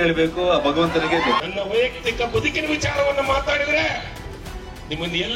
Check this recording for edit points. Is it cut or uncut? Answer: cut